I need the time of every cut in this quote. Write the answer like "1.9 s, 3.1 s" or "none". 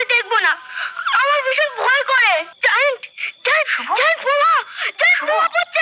2.5 s